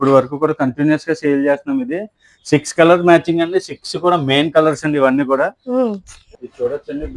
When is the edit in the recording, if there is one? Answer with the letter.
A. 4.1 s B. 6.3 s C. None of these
B